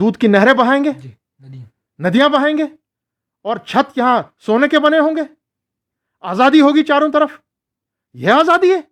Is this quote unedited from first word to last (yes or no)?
yes